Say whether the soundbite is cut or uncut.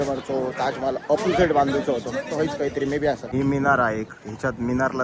cut